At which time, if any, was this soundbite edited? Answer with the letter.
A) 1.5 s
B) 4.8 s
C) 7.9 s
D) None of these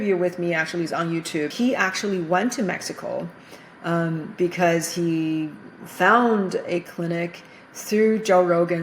A